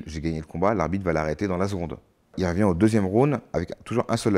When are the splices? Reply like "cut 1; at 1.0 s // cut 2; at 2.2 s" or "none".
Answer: cut 1; at 2.3 s